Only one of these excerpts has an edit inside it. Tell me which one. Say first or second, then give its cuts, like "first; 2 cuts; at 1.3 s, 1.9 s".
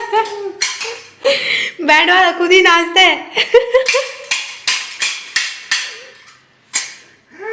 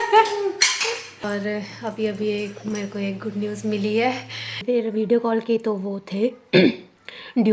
second; 2 cuts; at 1.2 s, 4.6 s